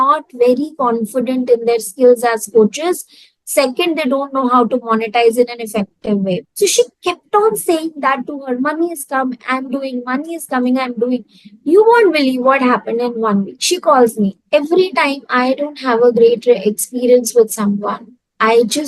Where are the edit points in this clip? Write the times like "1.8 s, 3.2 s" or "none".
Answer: 6.5 s, 14.4 s